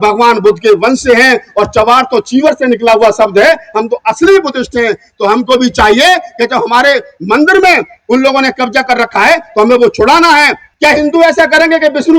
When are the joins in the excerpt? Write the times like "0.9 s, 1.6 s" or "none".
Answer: 10.6 s